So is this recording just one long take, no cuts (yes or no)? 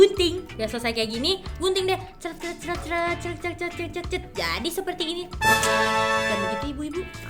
yes